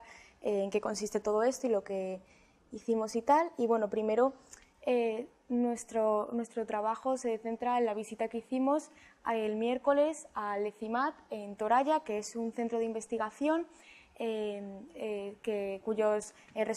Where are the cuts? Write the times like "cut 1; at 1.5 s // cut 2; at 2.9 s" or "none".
cut 1; at 1.6 s